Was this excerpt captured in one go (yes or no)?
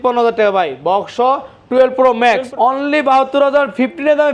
no